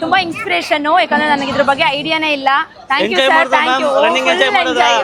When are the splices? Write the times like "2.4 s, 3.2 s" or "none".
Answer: none